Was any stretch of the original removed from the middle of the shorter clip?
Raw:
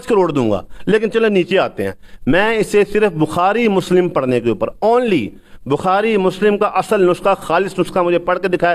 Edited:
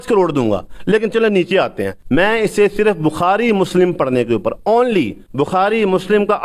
yes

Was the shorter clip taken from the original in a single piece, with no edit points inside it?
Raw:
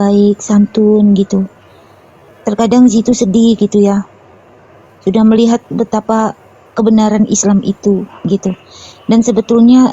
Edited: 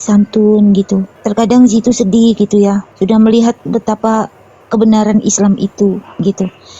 no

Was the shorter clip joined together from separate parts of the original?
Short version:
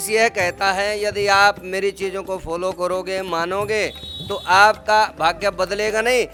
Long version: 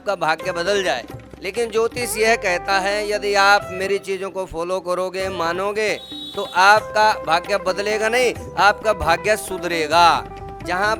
no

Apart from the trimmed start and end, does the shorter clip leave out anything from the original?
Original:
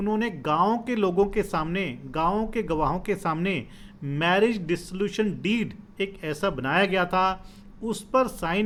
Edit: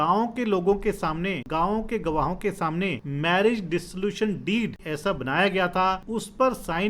yes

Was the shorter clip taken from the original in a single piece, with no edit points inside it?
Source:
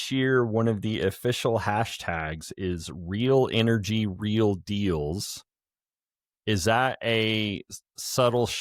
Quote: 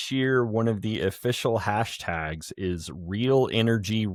yes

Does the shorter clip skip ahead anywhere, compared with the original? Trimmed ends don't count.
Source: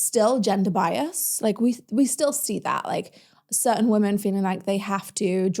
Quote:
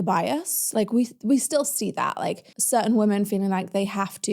yes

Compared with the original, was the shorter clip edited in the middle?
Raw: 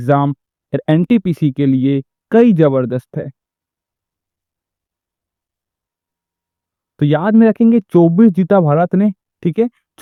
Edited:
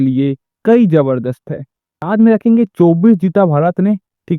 yes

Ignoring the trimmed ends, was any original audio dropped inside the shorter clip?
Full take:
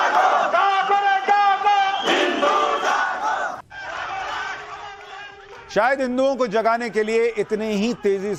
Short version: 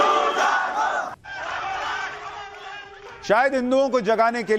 no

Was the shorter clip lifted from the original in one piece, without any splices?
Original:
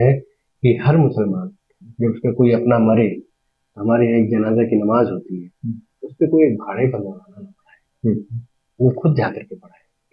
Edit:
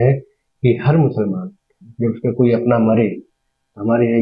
yes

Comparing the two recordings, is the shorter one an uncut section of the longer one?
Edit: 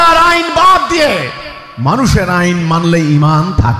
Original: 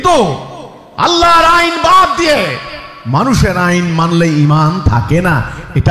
yes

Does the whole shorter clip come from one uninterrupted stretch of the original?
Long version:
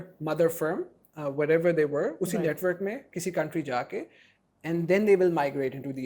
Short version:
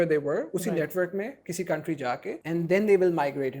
no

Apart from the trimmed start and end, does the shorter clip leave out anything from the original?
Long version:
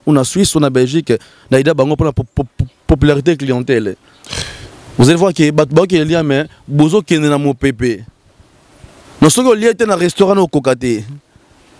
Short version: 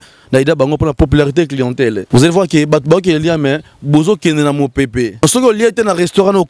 yes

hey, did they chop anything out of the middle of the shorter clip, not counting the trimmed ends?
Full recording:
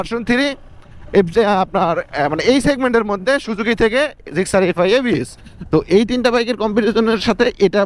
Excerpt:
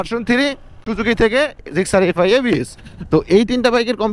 yes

